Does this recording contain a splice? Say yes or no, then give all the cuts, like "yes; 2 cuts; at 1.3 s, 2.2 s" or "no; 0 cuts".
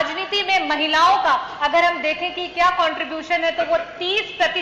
no; 0 cuts